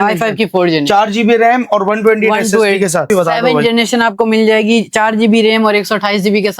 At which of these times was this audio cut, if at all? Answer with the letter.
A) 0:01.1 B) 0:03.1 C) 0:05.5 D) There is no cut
B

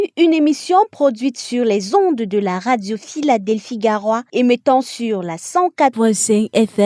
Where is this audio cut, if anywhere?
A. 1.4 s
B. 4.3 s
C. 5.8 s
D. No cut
C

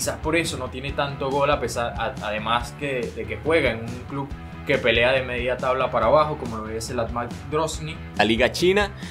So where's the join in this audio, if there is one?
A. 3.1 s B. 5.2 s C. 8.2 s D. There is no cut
C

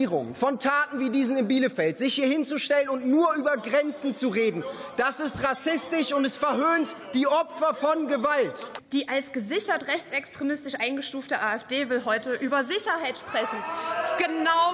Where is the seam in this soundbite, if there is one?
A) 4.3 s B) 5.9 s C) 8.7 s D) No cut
C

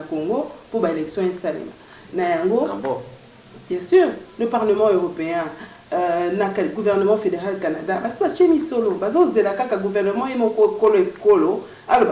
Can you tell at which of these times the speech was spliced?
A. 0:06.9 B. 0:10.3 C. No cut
C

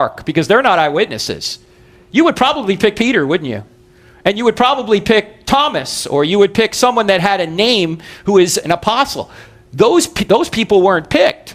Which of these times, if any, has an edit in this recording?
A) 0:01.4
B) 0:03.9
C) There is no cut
C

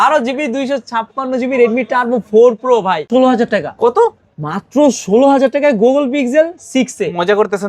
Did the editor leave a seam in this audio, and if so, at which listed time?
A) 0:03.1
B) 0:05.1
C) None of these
A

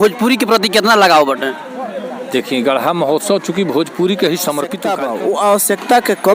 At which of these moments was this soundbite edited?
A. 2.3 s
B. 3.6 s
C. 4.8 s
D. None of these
C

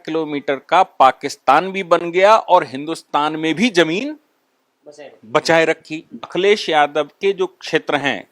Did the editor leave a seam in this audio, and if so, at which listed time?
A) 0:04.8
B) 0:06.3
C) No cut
B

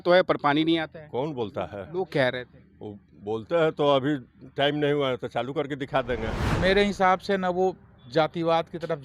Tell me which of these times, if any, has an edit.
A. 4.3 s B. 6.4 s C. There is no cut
B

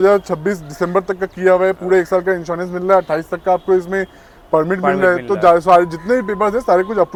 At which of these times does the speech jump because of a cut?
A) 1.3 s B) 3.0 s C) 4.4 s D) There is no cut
D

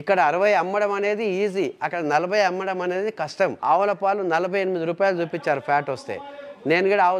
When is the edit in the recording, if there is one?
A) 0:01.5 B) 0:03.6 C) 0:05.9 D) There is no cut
B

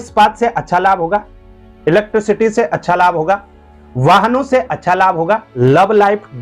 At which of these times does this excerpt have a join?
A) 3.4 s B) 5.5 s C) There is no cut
B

